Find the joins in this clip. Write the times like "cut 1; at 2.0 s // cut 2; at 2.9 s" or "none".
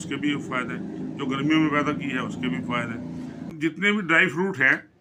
cut 1; at 3.5 s

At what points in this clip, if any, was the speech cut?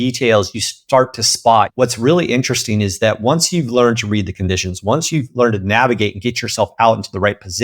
cut 1; at 1.7 s

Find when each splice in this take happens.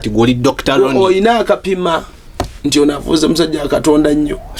none

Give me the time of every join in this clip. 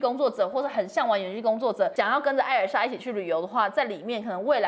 cut 1; at 1.9 s

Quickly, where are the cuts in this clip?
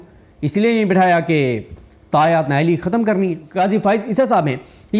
cut 1; at 3.4 s

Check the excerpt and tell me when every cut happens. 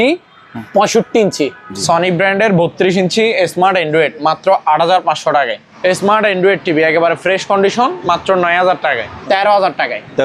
cut 1; at 1.7 s // cut 2; at 5.6 s // cut 3; at 9.1 s

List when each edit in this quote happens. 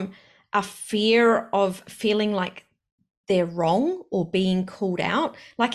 none

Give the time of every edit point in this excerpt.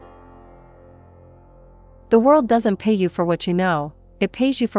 cut 1; at 1.4 s

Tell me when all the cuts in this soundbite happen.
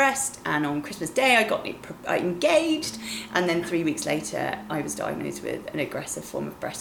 none

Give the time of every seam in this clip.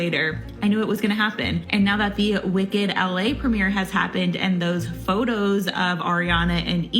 cut 1; at 1.6 s

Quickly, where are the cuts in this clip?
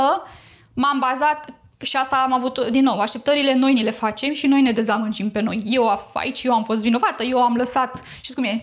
none

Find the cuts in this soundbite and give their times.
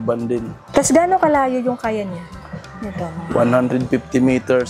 none

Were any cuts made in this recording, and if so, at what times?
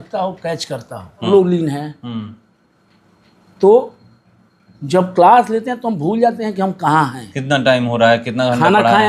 cut 1; at 1.3 s

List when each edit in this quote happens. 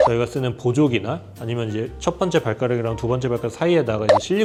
none

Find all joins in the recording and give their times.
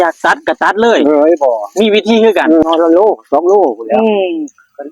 cut 1; at 2.6 s

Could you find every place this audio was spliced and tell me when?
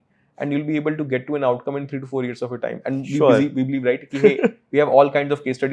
none

